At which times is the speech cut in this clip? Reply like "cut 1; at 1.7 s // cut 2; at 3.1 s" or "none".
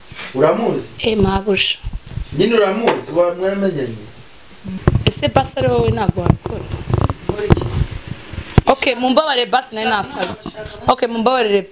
cut 1; at 4.7 s

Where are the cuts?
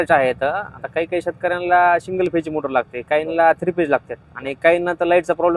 none

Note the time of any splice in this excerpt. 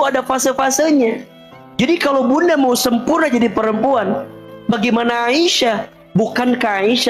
cut 1; at 4.4 s // cut 2; at 5.9 s

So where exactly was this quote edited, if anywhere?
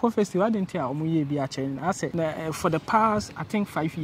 cut 1; at 2.1 s

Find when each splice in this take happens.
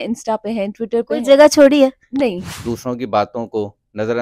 cut 1; at 2.5 s

